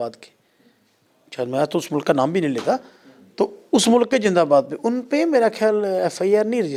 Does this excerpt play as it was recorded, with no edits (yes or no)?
yes